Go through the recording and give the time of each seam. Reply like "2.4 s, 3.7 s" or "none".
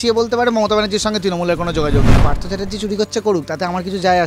2.2 s